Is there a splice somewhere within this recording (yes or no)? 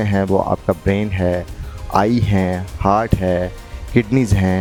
no